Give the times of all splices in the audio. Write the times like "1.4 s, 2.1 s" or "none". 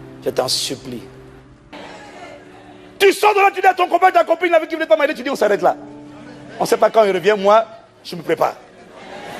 1.8 s